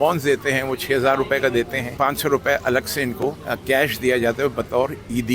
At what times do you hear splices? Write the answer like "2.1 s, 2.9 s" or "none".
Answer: 1.9 s, 3.5 s

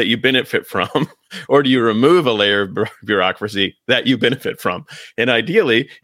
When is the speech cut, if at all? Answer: none

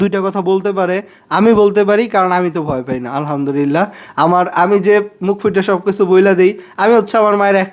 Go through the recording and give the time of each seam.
none

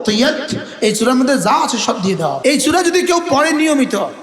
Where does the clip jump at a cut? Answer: 2.4 s

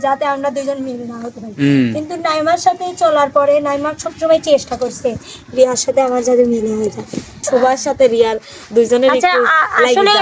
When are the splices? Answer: 7.4 s

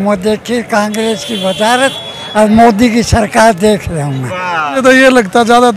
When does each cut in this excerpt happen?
4.7 s

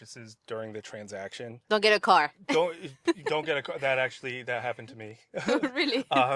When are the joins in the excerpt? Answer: 1.5 s

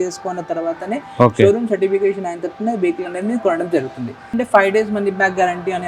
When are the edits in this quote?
4.3 s

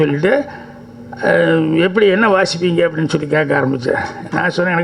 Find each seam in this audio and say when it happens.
none

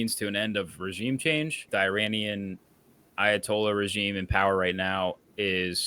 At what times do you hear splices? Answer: 1.7 s

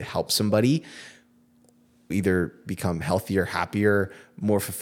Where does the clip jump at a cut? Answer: 2.1 s

